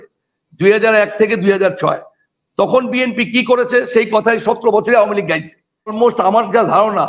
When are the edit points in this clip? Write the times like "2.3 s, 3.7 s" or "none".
5.9 s